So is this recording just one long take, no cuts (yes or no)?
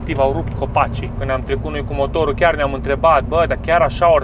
no